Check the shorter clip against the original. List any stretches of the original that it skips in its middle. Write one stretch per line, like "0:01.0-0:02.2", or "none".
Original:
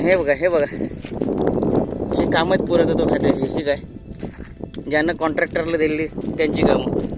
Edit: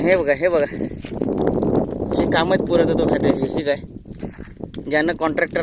none